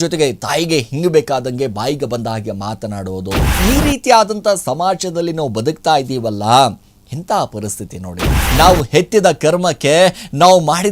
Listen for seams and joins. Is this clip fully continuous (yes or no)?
no